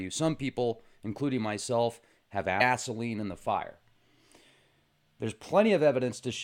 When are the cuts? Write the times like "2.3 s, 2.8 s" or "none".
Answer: none